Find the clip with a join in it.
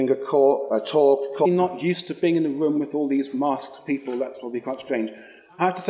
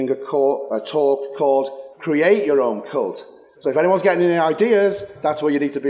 second; 1 cut; at 1.5 s

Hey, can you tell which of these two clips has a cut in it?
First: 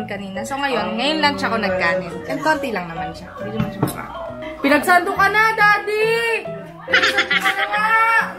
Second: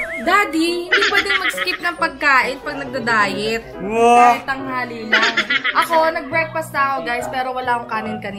first; 1 cut; at 4.4 s

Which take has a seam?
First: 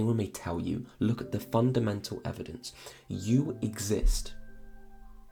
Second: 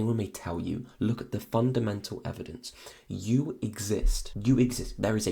second; 1 cut; at 4.2 s

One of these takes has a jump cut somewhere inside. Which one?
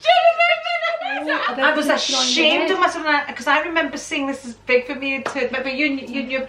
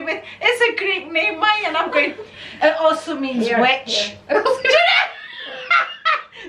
first; 1 cut; at 1.4 s

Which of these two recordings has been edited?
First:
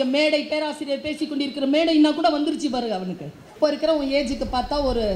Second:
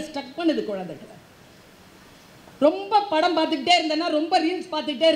first; 1 cut; at 3.5 s

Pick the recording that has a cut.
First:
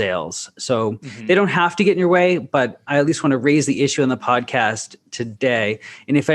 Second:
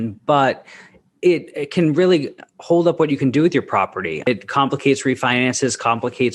second; 1 cut; at 4.2 s

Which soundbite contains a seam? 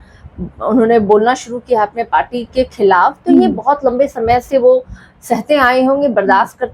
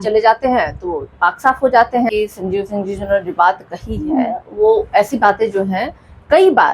second; 1 cut; at 2.1 s

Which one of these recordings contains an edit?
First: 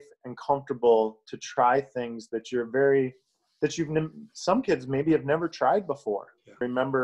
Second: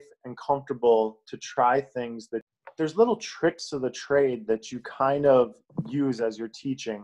second; 1 cut; at 2.4 s

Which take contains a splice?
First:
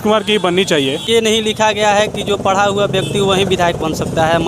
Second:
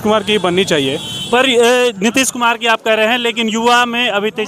first; 1 cut; at 1.1 s

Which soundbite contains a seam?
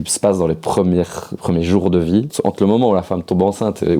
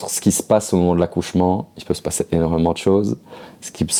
first; 1 cut; at 2.3 s

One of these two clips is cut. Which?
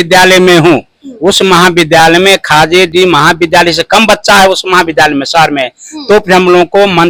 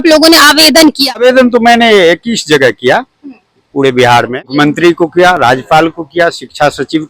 second; 2 cuts; at 1.2 s, 4.5 s

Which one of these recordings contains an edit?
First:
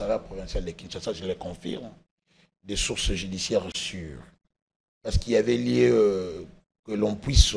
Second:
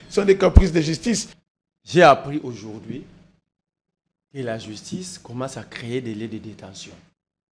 second; 1 cut; at 1.3 s

